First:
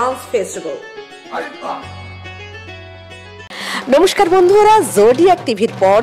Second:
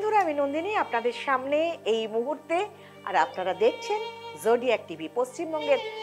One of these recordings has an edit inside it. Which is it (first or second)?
first